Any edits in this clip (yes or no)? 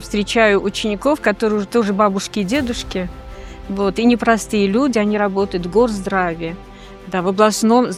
no